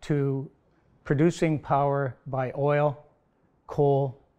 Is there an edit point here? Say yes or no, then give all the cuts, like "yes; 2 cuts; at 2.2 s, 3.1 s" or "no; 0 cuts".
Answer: no; 0 cuts